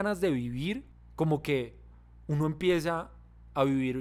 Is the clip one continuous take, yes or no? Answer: no